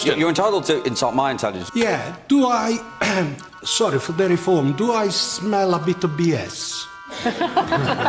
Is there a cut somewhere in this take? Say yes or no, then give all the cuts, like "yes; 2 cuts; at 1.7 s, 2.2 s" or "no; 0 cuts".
yes; 1 cut; at 1.6 s